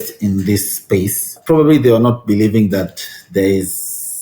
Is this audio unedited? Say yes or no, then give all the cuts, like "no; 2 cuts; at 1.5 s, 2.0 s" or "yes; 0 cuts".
no; 1 cut; at 1.4 s